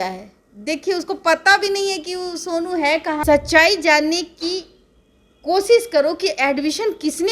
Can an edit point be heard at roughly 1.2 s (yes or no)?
no